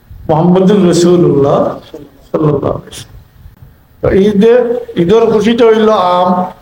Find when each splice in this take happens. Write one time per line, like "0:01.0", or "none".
0:03.5